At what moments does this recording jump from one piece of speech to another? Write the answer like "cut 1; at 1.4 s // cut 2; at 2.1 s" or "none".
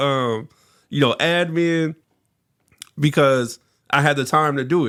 none